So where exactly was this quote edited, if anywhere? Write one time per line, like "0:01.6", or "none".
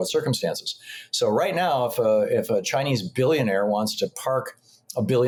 none